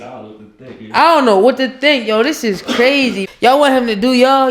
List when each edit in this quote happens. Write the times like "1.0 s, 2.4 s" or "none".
3.2 s